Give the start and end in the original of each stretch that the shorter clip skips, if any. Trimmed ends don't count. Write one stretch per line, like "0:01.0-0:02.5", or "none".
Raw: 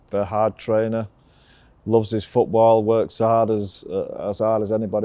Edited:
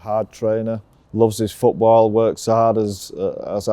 0:01.2-0:01.7

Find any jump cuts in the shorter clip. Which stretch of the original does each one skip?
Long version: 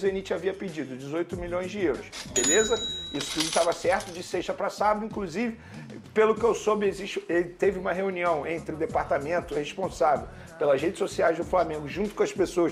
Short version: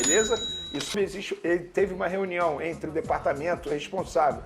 0:03.3-0:06.8

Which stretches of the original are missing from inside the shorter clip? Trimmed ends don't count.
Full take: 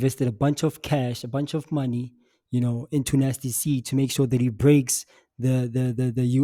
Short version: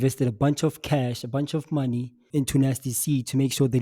0:02.2-0:02.8

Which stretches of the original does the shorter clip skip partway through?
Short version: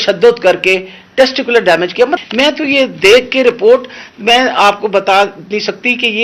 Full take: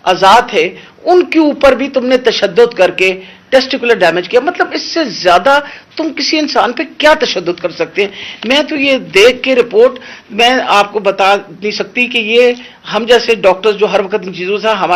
0:04.5-0:08.3

